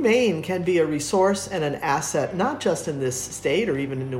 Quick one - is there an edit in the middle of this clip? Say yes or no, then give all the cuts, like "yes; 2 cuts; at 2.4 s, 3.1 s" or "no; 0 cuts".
no; 0 cuts